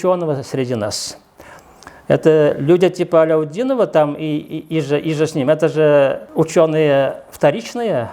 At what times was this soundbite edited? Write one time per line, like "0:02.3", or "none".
0:06.2